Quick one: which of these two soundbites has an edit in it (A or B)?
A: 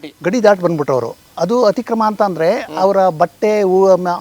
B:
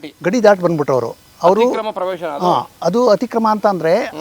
A